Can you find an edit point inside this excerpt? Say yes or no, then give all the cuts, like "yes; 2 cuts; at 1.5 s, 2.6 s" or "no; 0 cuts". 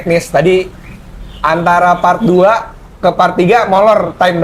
no; 0 cuts